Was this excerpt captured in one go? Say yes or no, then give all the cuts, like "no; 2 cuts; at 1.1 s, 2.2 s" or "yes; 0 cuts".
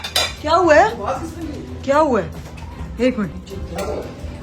no; 1 cut; at 3.4 s